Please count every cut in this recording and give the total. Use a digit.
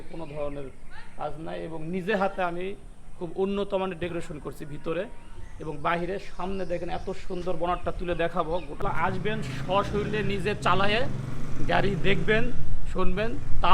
1